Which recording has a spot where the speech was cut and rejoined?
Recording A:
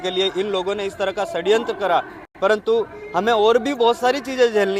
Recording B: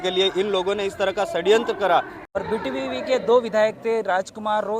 B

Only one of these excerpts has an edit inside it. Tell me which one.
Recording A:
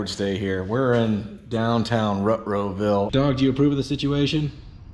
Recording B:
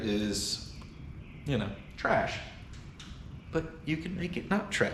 A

